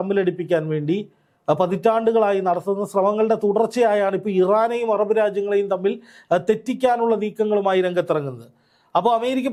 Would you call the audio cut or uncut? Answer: uncut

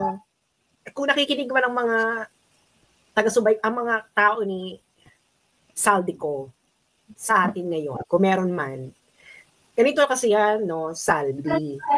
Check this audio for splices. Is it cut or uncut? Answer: uncut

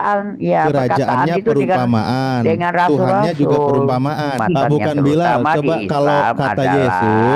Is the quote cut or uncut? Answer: cut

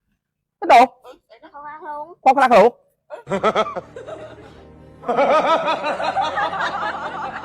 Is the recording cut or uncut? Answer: uncut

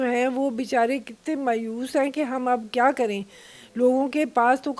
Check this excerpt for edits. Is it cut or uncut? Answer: uncut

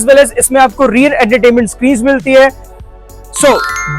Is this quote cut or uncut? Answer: cut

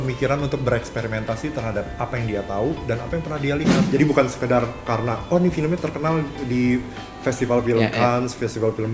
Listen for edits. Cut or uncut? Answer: cut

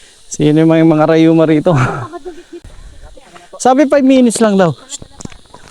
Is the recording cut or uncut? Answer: cut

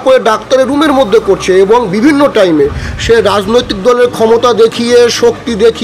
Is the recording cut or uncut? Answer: uncut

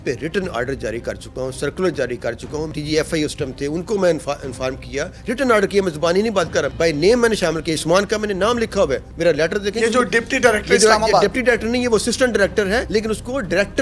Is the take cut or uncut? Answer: uncut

